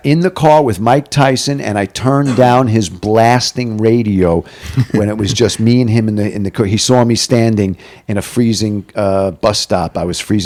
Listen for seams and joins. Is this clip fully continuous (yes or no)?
yes